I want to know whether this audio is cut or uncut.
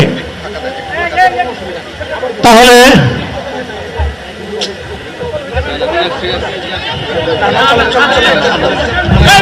uncut